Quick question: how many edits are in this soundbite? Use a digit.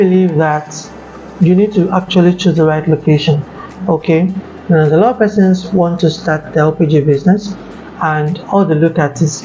0